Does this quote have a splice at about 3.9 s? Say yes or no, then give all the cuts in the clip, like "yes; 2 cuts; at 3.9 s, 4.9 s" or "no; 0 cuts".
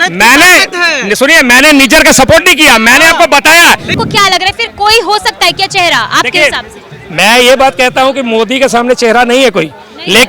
yes; 1 cut; at 3.9 s